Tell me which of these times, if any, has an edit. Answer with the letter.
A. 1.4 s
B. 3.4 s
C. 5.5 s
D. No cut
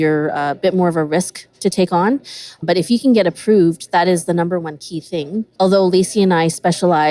C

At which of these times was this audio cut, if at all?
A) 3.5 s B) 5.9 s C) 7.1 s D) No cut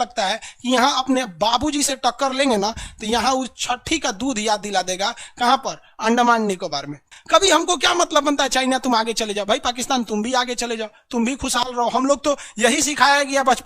C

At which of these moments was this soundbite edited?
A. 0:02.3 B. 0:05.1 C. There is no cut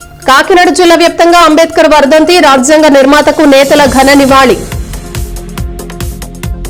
C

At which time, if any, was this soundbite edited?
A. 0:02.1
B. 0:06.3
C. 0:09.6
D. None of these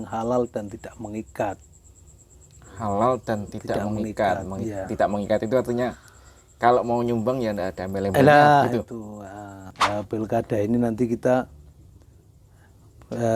C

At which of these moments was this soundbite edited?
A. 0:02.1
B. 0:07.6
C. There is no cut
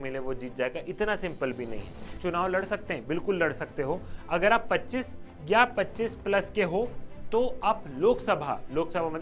A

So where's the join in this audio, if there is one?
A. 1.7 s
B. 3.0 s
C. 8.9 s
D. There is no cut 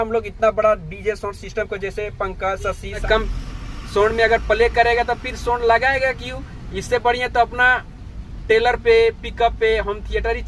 B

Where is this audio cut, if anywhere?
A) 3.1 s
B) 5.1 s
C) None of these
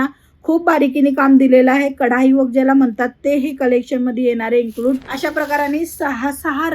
B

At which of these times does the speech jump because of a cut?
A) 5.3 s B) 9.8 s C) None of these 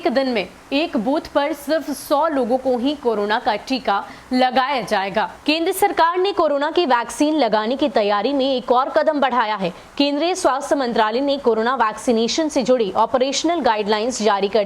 A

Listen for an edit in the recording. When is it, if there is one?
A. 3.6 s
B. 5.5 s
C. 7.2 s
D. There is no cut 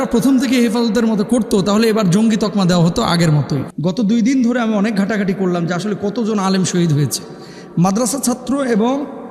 A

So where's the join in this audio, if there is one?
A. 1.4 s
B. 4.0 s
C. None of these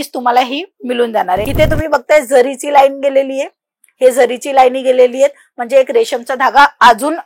A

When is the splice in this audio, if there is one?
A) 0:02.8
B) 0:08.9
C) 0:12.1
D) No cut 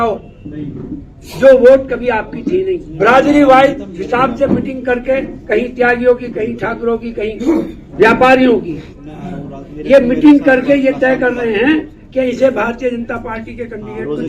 A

